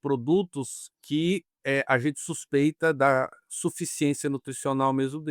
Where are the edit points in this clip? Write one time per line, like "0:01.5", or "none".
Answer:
0:01.5